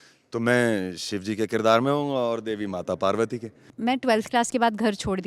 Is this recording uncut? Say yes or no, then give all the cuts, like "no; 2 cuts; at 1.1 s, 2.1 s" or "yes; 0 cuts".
no; 1 cut; at 3.7 s